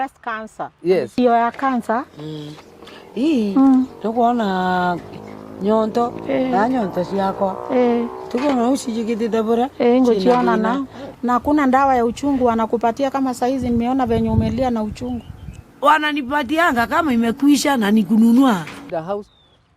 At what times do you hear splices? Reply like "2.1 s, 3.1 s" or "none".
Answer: 1.1 s, 18.8 s